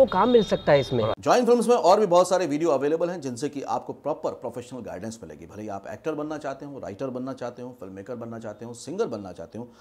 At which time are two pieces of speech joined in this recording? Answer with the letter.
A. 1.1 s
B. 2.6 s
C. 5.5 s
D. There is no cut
A